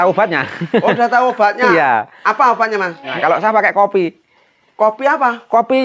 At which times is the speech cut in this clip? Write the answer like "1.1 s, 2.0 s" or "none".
3.1 s